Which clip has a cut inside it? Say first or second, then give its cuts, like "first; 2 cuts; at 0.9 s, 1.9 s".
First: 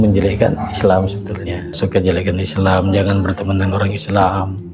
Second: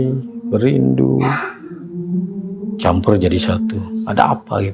first; 1 cut; at 1.8 s